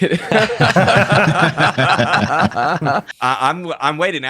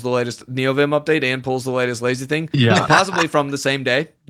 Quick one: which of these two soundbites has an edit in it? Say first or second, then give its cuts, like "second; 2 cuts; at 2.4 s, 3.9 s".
first; 1 cut; at 3.1 s